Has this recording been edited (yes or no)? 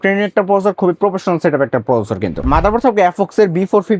yes